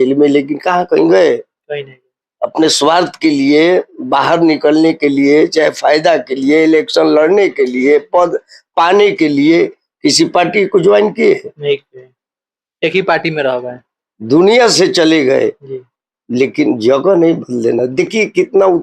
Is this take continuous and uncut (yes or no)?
yes